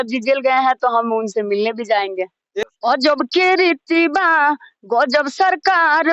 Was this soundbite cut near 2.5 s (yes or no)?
yes